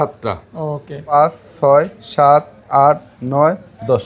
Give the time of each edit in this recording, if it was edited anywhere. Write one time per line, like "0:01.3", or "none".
0:01.1